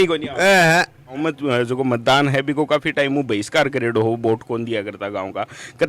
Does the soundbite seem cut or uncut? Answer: cut